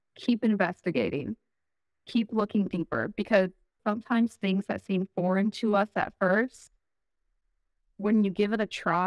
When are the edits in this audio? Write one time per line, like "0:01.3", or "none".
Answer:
0:03.7